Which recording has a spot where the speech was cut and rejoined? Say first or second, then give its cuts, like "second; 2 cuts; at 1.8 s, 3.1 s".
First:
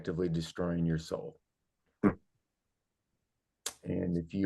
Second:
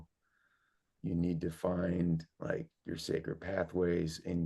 second; 1 cut; at 1.0 s